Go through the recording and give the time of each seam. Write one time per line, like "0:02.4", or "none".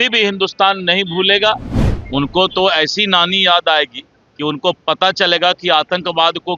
0:01.7